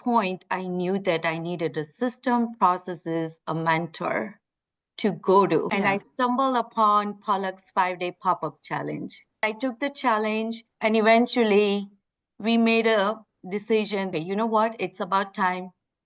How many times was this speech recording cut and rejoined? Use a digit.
4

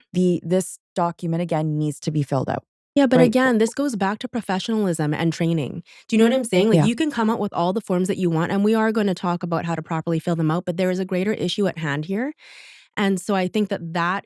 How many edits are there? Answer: 1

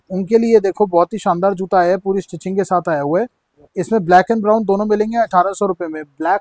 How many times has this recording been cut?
0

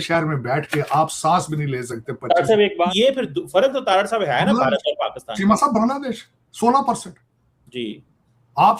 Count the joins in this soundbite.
1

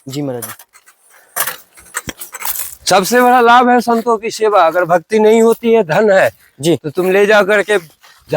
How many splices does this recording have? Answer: 1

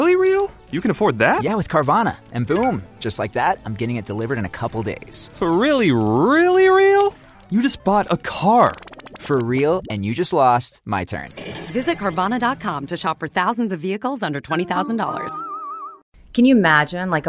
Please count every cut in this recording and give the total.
1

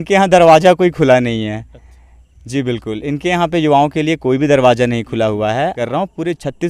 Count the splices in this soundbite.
1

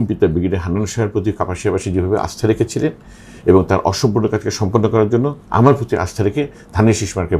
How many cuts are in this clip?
0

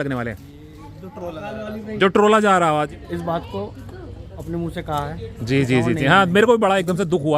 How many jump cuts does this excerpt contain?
1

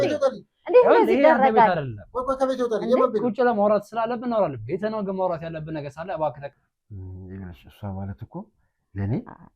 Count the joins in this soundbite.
1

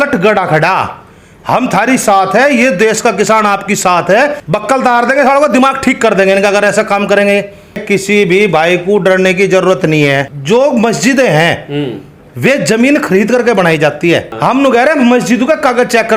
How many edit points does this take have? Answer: 4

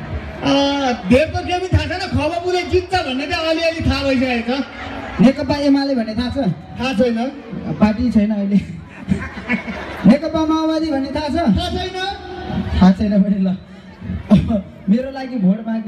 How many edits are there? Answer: 0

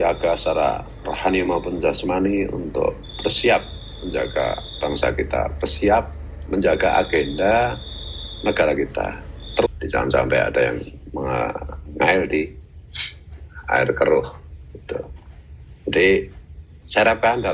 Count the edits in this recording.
1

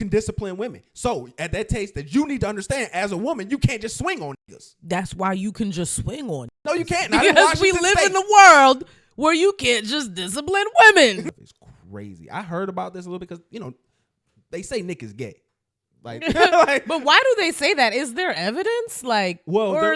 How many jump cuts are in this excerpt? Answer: 1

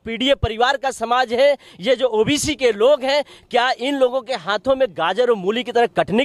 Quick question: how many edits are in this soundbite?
0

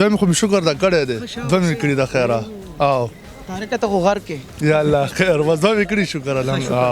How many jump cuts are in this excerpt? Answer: 0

